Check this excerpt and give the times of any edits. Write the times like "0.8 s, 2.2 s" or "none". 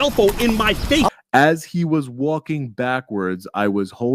1.1 s